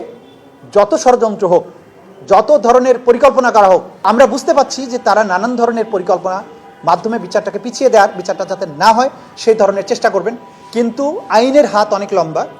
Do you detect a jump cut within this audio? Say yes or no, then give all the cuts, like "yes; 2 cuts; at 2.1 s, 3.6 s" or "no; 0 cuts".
yes; 1 cut; at 4.1 s